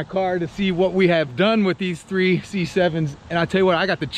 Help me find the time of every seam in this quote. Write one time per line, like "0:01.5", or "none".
none